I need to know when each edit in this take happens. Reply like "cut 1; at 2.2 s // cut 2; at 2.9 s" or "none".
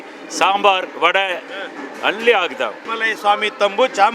cut 1; at 2.9 s